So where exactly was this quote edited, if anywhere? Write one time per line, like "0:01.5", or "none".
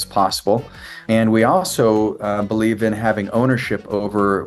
0:00.9